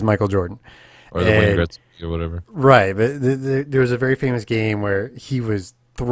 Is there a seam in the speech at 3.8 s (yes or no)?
yes